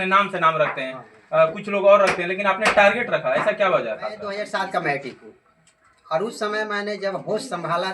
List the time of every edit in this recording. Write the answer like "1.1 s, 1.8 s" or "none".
4.3 s